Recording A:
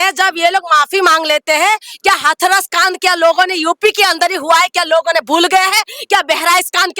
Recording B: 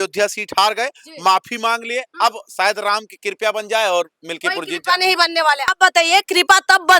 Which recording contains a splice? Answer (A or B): B